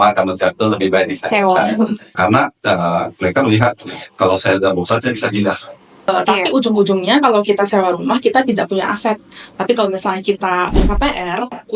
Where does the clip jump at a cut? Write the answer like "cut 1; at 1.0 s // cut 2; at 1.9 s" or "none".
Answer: cut 1; at 2.1 s // cut 2; at 6.1 s